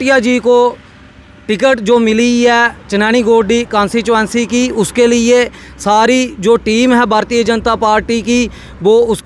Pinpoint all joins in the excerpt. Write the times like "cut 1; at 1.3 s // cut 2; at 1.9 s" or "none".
none